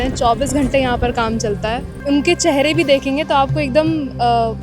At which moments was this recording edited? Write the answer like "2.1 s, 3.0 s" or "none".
1.9 s